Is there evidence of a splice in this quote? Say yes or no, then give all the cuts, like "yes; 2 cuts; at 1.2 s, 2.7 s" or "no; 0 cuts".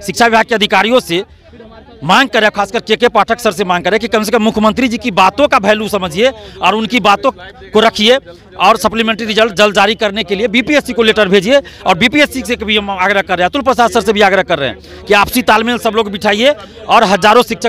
no; 0 cuts